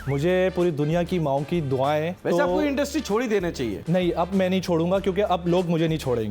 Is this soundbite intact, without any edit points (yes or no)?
no